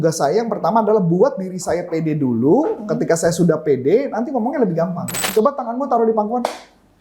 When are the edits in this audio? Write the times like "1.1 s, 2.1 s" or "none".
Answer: 5.1 s